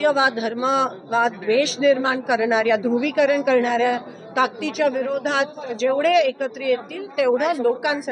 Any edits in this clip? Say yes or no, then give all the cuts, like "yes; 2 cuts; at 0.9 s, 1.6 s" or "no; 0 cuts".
no; 0 cuts